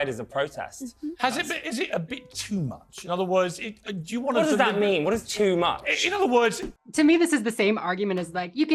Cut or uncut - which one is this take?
uncut